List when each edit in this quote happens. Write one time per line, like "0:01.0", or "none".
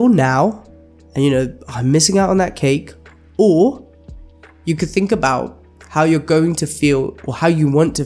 none